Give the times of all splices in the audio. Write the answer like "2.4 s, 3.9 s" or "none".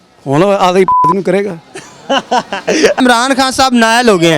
2.9 s